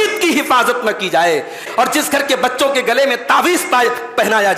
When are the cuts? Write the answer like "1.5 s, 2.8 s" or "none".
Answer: 1.7 s